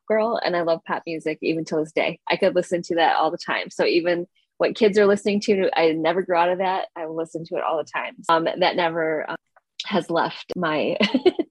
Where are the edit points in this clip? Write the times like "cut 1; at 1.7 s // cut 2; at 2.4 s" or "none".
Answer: cut 1; at 8.3 s // cut 2; at 9.4 s // cut 3; at 10.5 s

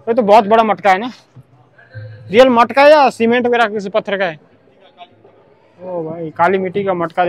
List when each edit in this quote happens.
none

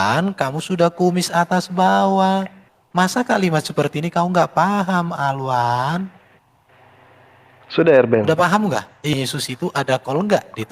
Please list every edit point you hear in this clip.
cut 1; at 9.1 s

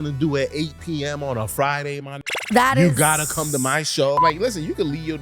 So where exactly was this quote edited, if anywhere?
cut 1; at 4.2 s

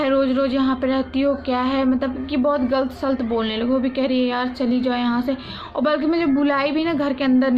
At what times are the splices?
none

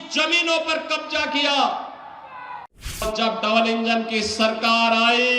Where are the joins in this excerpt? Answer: cut 1; at 3.0 s

